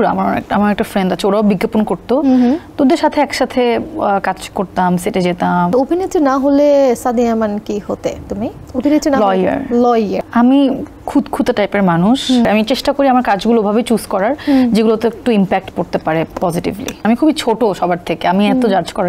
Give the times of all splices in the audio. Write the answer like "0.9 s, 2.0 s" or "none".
5.7 s, 8.6 s, 10.2 s, 12.4 s, 17.0 s